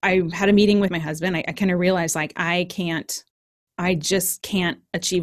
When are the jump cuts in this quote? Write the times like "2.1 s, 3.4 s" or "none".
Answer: 0.9 s